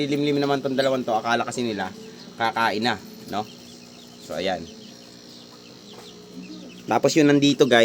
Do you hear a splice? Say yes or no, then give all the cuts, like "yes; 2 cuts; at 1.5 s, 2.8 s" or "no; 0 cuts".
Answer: no; 0 cuts